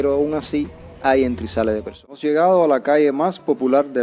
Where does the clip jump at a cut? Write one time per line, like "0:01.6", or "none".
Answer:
0:02.2